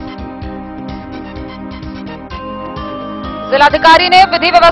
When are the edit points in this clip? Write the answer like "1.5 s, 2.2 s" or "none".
1.4 s, 3.5 s